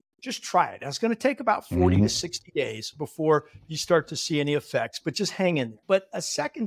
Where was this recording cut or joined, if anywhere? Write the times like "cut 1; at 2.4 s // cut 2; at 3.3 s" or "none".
cut 1; at 5.8 s